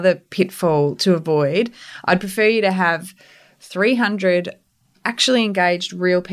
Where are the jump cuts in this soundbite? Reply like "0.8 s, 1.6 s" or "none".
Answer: none

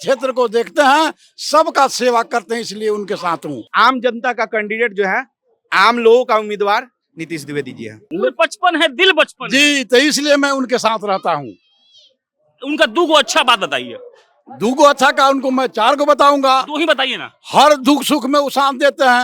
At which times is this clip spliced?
3.6 s, 7.9 s

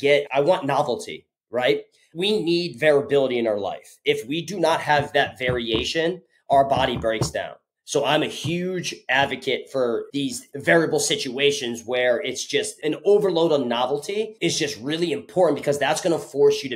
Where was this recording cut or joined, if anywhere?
10.1 s, 14.3 s

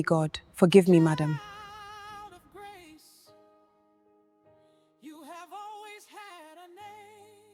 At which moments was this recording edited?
none

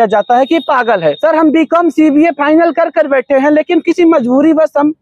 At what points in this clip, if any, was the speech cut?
1.2 s

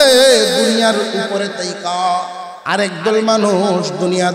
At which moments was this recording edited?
2.5 s

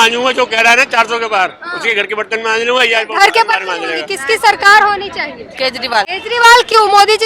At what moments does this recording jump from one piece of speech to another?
4.1 s, 6.2 s

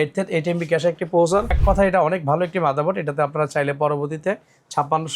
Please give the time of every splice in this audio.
1.6 s

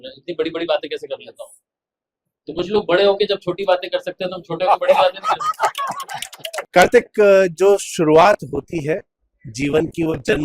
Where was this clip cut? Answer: 6.7 s

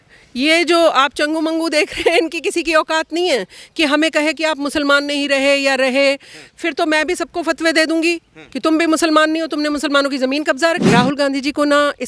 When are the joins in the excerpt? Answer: 10.9 s

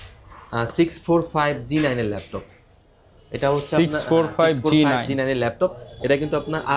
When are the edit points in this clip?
none

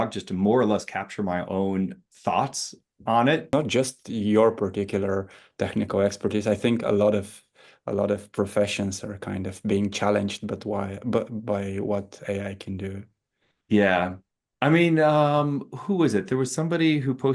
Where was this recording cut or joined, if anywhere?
3.5 s

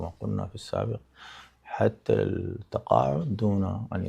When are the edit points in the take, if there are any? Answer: none

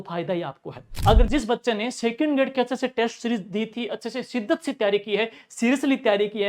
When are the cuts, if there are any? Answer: 1.2 s

